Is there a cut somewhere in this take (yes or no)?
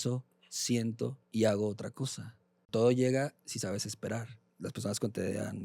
yes